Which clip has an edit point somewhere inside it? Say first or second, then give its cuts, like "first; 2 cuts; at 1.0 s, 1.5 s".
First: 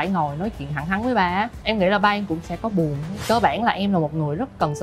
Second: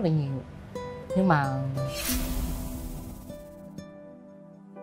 first; 2 cuts; at 1.6 s, 3.1 s